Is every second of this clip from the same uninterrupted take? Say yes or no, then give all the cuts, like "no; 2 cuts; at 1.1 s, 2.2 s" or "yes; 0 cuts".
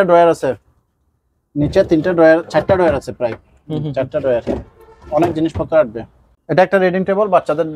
no; 1 cut; at 6.4 s